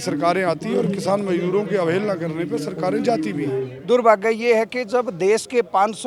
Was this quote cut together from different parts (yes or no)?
yes